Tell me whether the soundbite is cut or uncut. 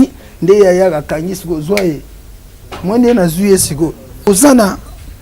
cut